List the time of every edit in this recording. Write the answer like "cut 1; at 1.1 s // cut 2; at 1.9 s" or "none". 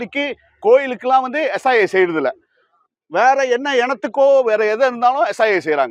none